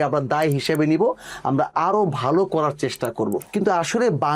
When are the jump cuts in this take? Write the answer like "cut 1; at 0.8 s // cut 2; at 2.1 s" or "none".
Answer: cut 1; at 3.4 s